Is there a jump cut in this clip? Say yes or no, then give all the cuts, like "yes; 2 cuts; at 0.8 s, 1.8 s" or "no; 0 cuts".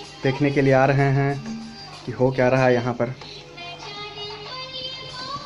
no; 0 cuts